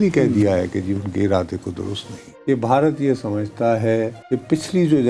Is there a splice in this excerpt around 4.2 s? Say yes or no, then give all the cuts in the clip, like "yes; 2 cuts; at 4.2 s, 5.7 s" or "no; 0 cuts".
yes; 2 cuts; at 2.3 s, 4.2 s